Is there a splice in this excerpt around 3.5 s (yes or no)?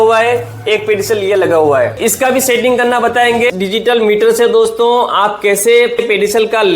yes